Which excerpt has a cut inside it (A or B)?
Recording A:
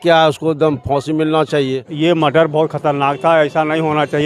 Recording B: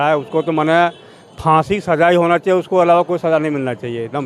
A